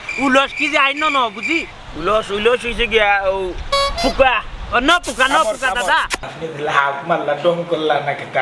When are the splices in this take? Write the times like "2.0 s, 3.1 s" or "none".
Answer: 6.2 s